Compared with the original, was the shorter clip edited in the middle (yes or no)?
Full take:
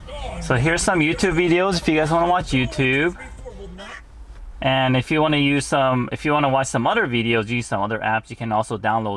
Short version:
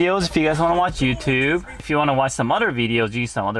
yes